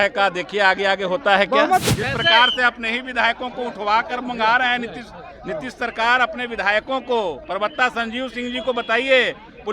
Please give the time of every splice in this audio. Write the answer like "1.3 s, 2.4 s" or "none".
1.8 s